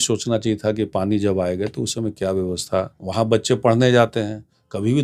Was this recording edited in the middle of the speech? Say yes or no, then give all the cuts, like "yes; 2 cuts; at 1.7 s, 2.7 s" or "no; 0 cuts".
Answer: yes; 1 cut; at 2.9 s